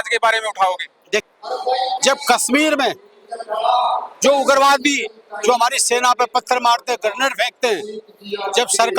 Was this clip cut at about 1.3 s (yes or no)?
yes